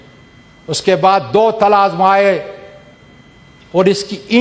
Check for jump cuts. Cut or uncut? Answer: uncut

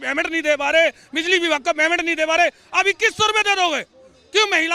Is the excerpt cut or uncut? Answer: uncut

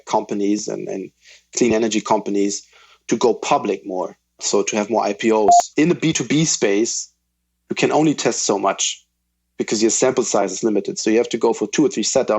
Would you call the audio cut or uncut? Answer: cut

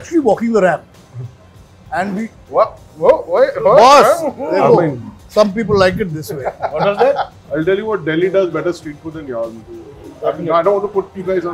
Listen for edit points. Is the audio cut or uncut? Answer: cut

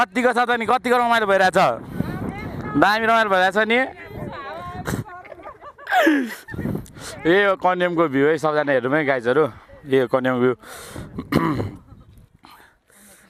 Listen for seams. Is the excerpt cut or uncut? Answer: uncut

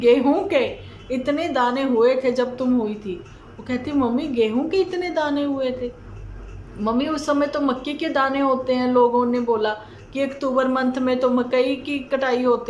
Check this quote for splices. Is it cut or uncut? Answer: uncut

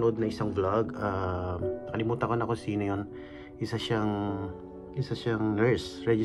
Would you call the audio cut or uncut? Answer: uncut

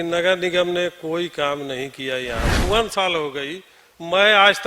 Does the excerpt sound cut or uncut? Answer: cut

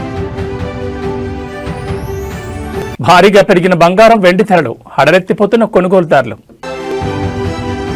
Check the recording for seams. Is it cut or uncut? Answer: cut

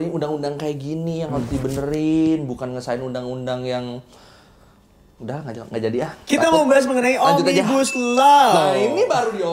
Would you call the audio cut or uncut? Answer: uncut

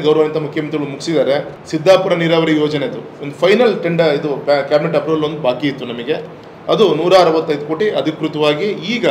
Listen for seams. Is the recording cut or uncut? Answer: cut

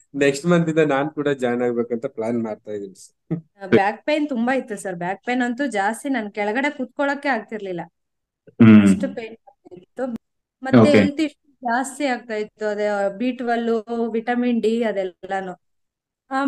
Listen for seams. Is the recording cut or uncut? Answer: cut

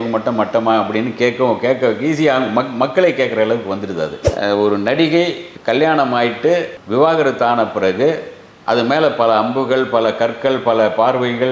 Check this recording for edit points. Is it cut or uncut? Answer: cut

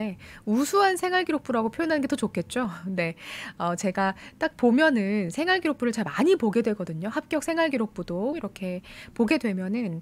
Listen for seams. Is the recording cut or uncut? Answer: cut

